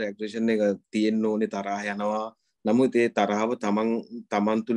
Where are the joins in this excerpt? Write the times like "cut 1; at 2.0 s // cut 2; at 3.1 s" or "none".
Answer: none